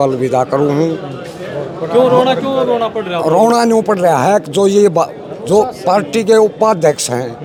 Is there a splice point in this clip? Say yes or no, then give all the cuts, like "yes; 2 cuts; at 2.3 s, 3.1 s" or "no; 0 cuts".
no; 0 cuts